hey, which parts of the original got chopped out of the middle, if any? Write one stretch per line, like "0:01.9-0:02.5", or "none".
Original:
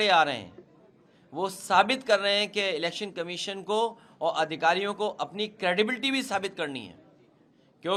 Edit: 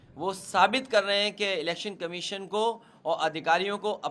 none